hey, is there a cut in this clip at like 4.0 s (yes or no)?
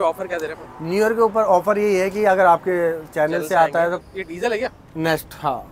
yes